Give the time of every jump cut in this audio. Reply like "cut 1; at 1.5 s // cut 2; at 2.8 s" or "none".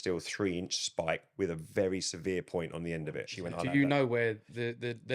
cut 1; at 3.3 s